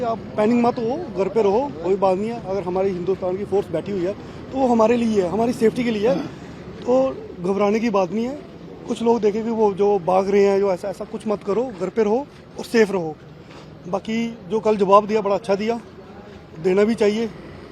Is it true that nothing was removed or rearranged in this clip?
yes; 0 cuts

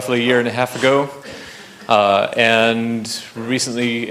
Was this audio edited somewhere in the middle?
no; 0 cuts

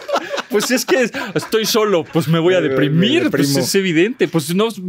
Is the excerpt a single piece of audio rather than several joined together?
yes; 0 cuts

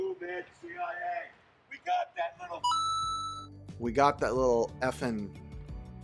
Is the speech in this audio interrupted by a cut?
no; 0 cuts

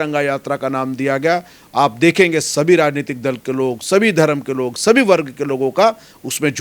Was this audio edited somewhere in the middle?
no; 0 cuts

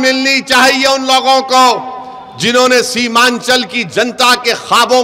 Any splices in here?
no; 0 cuts

